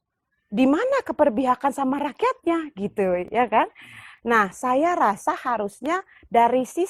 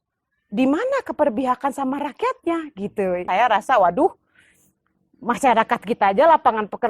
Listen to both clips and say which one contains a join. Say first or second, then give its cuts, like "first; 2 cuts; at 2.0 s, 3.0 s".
second; 1 cut; at 3.2 s